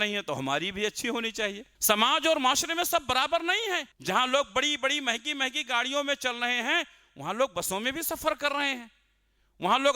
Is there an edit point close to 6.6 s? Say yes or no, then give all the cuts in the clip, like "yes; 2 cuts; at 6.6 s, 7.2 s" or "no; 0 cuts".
no; 2 cuts; at 1.7 s, 3.9 s